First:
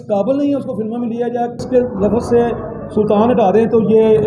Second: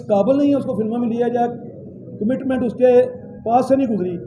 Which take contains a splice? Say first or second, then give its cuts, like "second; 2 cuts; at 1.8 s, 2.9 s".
first; 1 cut; at 1.6 s